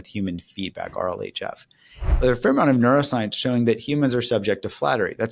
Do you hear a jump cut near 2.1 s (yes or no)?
yes